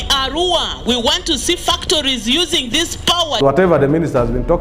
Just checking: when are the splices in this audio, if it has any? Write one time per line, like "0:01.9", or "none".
0:03.4